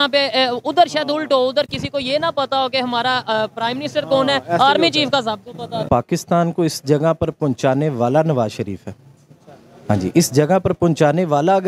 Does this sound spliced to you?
yes; 1 cut; at 5.8 s

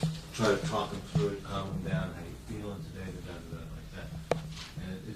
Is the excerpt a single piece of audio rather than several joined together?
yes; 0 cuts

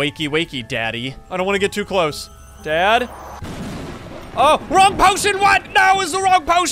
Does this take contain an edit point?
yes; 1 cut; at 1.2 s

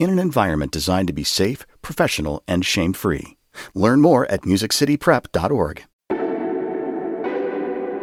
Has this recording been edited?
no; 0 cuts

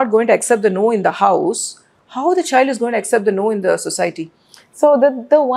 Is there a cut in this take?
no; 0 cuts

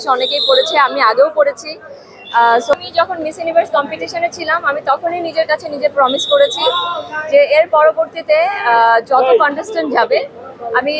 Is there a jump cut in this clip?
yes; 1 cut; at 2.8 s

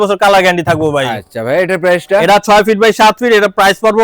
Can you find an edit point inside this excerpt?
no; 0 cuts

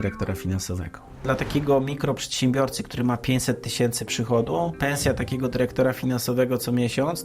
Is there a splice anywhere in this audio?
yes; 2 cuts; at 1.2 s, 4.7 s

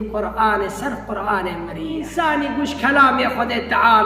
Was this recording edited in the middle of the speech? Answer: yes; 1 cut; at 2.1 s

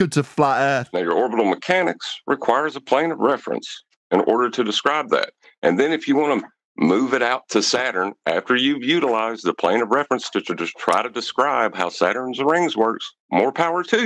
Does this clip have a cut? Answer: yes; 1 cut; at 0.9 s

